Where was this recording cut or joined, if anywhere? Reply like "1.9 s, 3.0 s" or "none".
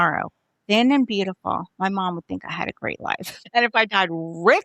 3.4 s